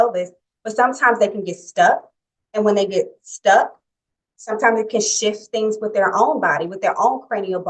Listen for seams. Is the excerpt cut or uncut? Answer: uncut